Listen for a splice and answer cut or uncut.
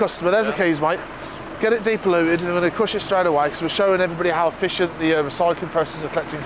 uncut